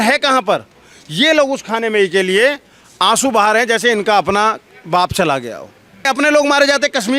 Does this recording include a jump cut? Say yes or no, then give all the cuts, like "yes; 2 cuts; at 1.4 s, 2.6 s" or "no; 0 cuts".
yes; 1 cut; at 6.1 s